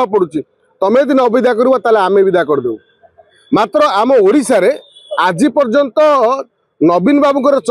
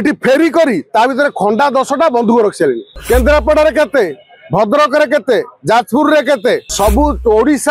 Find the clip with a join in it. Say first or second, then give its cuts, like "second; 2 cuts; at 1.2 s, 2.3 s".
second; 2 cuts; at 2.9 s, 6.7 s